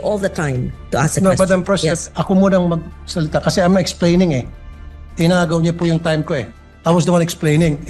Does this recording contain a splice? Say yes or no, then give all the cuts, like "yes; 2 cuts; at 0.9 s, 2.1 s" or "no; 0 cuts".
no; 0 cuts